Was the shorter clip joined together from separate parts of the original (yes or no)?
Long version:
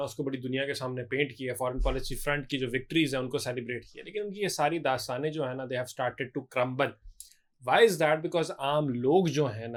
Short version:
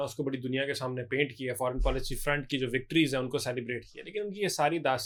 no